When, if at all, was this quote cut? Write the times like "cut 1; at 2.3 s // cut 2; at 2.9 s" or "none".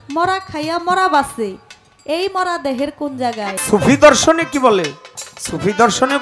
cut 1; at 3.6 s